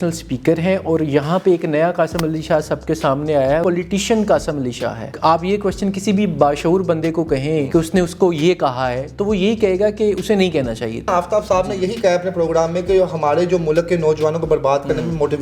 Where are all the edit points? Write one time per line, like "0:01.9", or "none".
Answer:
0:03.6
0:05.1
0:07.7
0:11.1